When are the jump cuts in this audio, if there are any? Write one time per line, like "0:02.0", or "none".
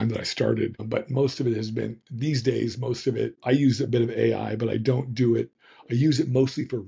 0:00.8
0:03.4